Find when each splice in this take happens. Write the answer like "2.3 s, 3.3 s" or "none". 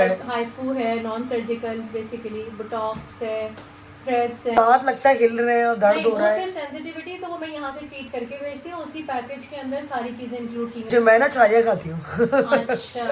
4.6 s, 10.9 s